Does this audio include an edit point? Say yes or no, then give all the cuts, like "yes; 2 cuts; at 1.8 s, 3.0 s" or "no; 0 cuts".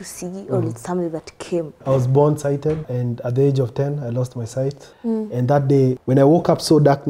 yes; 4 cuts; at 1.8 s, 2.9 s, 4.9 s, 6.0 s